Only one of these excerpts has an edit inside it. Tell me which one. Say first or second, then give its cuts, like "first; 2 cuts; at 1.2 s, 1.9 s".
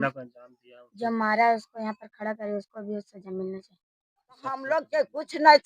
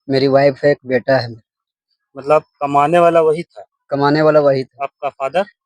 first; 1 cut; at 4.4 s